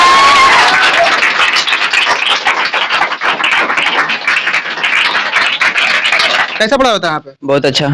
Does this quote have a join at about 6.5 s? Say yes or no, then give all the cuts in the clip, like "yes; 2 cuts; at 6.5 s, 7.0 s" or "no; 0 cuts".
yes; 1 cut; at 6.5 s